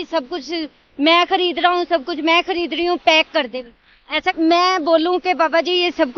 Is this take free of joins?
no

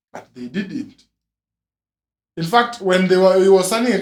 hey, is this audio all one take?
yes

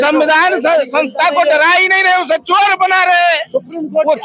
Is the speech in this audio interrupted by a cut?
no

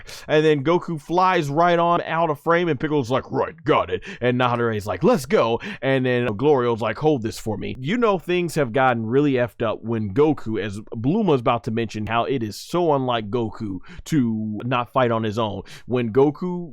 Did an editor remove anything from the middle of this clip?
yes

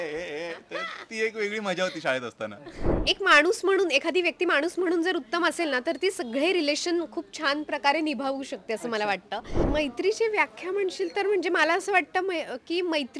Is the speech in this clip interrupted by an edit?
yes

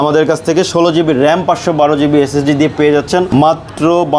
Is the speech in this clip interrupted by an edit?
no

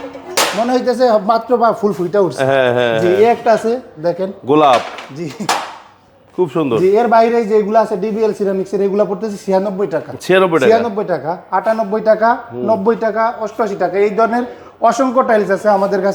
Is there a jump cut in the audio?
no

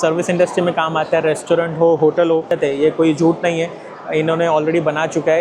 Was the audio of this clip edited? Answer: yes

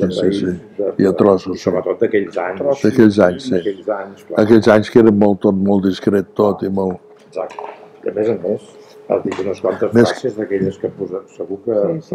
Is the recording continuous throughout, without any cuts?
yes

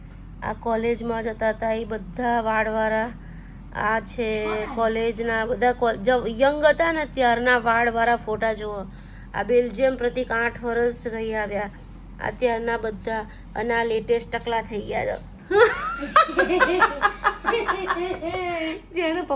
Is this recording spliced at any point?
no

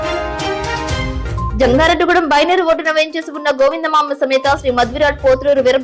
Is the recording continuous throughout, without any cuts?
no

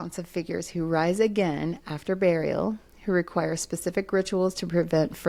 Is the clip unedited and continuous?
yes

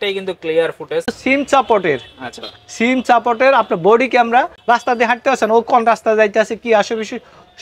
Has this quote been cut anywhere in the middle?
yes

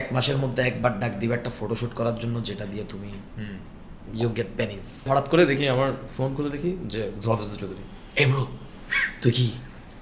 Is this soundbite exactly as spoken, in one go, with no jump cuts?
no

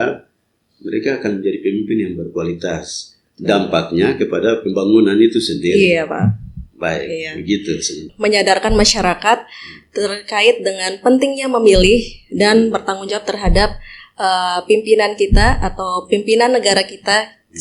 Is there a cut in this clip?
yes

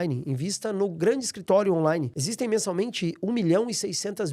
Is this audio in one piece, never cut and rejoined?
no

